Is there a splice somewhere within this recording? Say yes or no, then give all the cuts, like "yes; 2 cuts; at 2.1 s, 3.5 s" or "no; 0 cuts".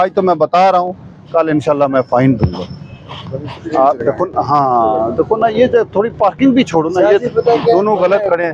no; 0 cuts